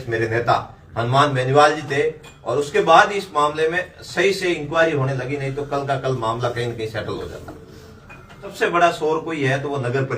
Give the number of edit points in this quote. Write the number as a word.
one